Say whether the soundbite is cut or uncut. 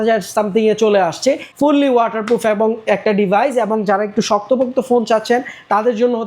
cut